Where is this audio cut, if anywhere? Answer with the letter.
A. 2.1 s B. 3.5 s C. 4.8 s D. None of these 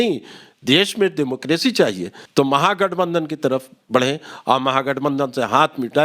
A